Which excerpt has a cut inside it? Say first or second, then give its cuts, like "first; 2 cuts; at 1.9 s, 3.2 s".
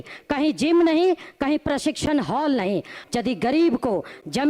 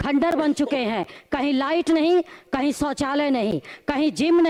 first; 1 cut; at 3.0 s